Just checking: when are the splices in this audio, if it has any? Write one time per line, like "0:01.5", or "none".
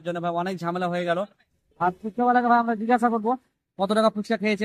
none